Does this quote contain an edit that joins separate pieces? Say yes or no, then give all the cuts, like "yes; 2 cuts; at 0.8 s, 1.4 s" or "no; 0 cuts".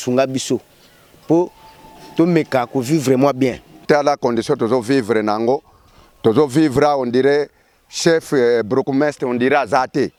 no; 0 cuts